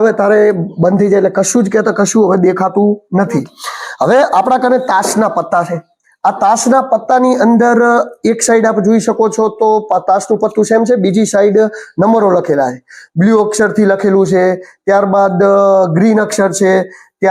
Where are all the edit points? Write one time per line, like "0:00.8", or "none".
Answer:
none